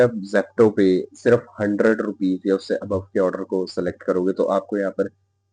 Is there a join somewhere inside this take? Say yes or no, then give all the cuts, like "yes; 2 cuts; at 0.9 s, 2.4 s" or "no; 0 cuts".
no; 0 cuts